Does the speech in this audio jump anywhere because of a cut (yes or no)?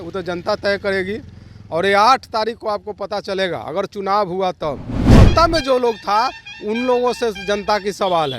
yes